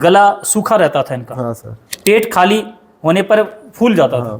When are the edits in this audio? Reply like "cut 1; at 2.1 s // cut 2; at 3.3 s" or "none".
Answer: cut 1; at 1.9 s

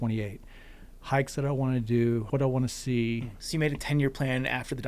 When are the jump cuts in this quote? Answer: cut 1; at 2.3 s // cut 2; at 3.4 s

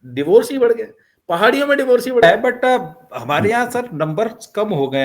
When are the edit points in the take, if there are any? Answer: cut 1; at 2.2 s

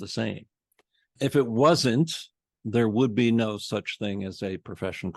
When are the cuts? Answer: cut 1; at 1.1 s

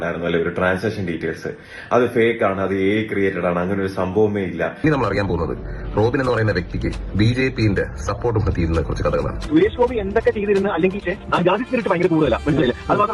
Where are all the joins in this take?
cut 1; at 4.8 s

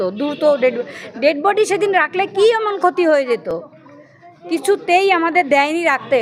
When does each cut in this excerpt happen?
none

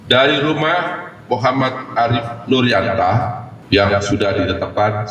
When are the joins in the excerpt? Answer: cut 1; at 3.5 s

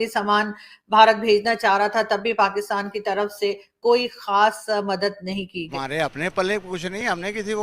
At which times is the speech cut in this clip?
cut 1; at 5.6 s

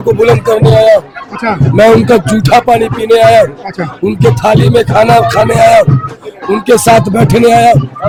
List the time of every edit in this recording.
none

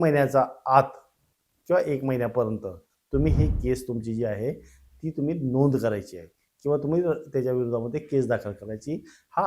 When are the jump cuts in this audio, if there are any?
none

